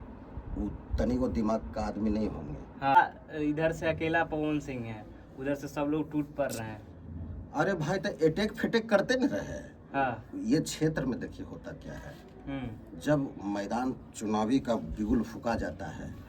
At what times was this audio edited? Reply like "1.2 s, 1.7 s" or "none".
3.0 s